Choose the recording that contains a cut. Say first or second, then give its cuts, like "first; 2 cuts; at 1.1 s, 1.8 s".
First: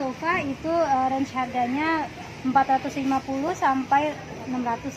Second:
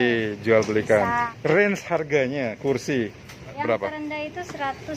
second; 2 cuts; at 1.3 s, 3.5 s